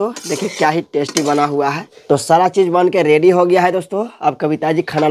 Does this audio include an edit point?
yes; 1 cut; at 1.9 s

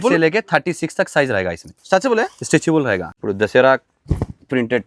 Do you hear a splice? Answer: yes; 1 cut; at 3.1 s

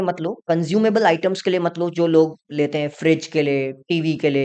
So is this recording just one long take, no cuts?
yes; 0 cuts

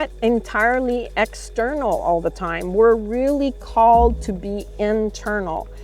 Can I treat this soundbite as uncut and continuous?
yes; 0 cuts

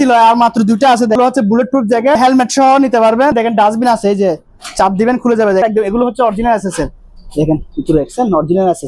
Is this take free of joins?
no; 4 cuts; at 1.2 s, 2.2 s, 3.3 s, 5.6 s

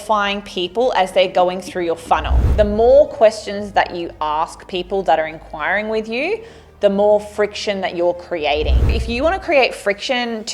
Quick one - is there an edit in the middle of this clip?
yes; 2 cuts; at 2.5 s, 9.0 s

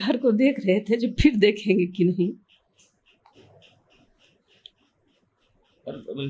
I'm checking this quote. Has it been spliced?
no; 0 cuts

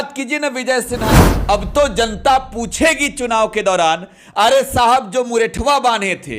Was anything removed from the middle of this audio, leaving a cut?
yes; 1 cut; at 1.0 s

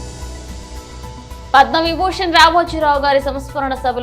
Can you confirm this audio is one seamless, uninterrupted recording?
yes; 0 cuts

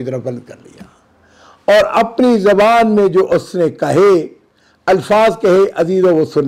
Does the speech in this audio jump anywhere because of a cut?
no; 0 cuts

